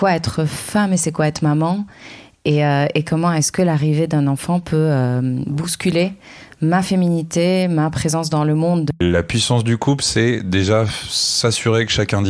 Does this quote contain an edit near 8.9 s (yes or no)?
yes